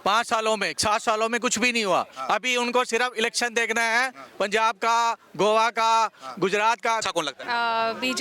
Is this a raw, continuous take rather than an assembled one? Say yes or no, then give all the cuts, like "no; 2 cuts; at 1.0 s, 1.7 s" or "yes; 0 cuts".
no; 1 cut; at 7.0 s